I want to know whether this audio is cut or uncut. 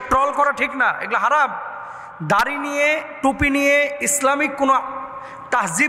uncut